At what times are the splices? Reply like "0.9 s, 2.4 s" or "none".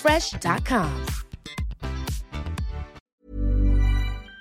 3.0 s